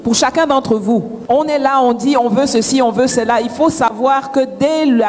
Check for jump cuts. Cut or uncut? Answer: cut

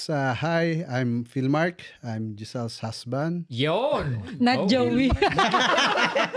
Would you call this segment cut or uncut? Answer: uncut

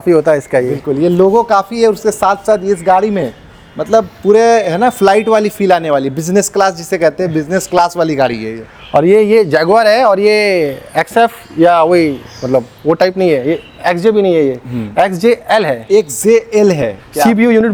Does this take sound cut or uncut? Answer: uncut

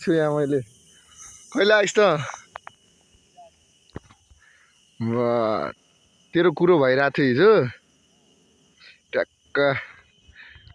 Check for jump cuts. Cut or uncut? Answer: uncut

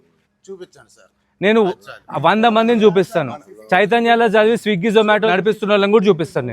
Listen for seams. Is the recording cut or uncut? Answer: cut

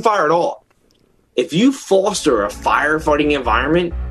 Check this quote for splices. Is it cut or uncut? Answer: uncut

